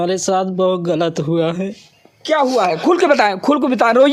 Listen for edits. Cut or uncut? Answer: uncut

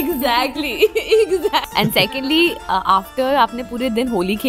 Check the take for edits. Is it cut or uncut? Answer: cut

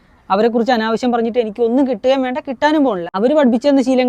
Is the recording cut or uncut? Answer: cut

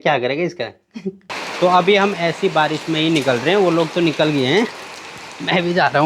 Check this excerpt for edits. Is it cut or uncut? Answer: cut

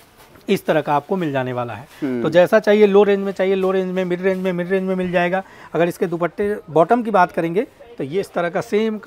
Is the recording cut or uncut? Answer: uncut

